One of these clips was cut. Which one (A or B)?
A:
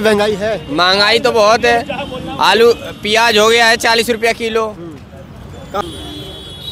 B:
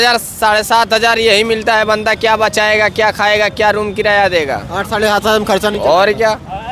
A